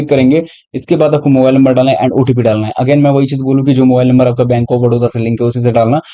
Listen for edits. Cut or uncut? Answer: uncut